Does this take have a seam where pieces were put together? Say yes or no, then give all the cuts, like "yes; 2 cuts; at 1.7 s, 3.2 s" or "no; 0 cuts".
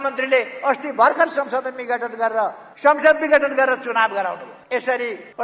no; 0 cuts